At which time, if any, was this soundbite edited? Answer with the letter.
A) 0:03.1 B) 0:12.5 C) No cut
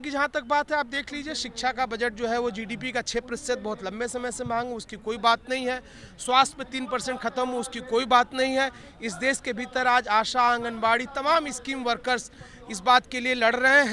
C